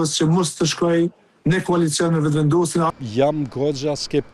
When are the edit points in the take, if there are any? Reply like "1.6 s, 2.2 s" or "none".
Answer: 2.9 s